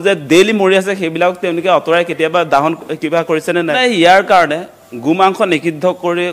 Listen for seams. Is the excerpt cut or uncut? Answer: cut